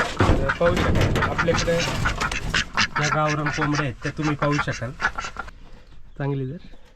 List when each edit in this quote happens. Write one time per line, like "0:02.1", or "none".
0:05.5